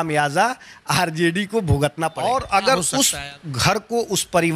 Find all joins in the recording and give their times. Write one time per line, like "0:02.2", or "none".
0:02.2